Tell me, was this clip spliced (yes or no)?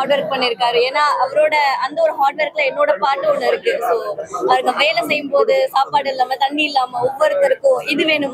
no